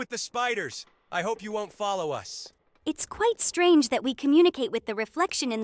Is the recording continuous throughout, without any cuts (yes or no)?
yes